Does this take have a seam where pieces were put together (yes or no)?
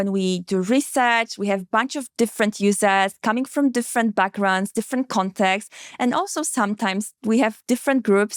no